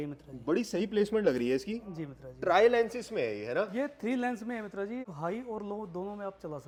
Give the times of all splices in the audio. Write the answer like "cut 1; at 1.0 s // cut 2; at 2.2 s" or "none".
none